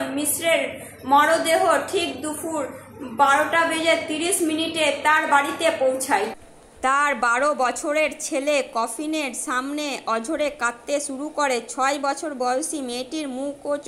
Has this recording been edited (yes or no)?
no